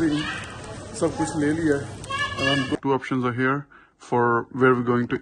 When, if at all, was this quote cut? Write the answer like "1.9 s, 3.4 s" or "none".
2.8 s